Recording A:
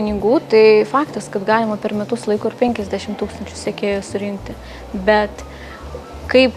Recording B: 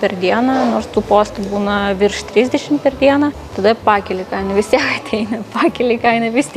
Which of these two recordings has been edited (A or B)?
B